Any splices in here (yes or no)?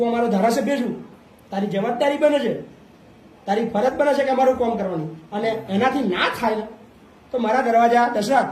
no